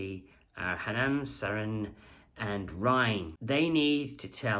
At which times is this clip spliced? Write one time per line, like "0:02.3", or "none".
0:03.3